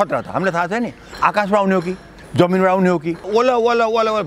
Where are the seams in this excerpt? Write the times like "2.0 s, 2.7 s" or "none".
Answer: 3.3 s